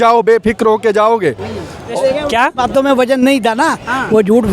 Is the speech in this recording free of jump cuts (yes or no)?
no